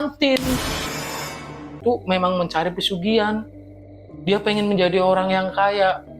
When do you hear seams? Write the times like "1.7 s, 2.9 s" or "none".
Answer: 1.8 s